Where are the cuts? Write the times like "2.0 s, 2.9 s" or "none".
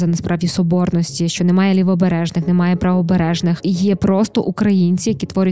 3.6 s